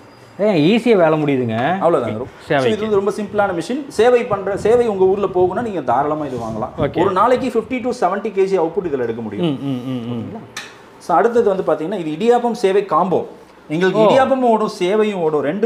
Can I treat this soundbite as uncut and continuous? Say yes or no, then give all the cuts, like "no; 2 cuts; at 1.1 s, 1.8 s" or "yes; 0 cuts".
no; 1 cut; at 2.2 s